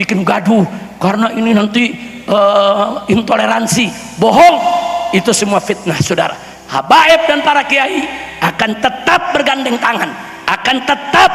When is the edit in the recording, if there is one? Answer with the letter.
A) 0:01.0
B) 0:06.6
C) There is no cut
C